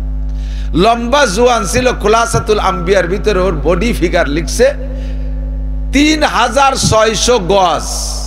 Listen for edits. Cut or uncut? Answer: uncut